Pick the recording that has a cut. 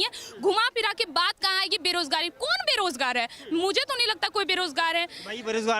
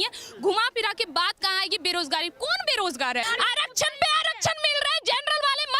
second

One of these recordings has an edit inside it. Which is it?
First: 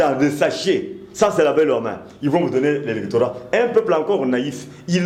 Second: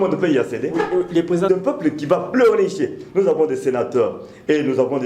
second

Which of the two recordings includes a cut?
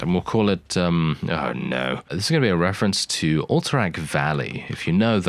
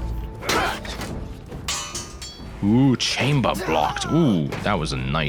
first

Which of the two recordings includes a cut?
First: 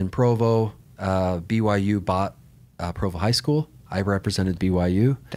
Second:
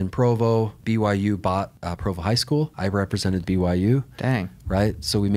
second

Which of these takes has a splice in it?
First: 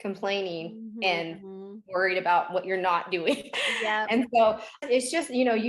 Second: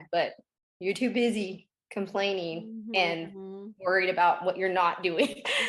first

